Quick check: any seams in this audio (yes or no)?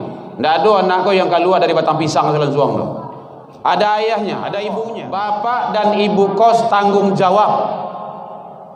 yes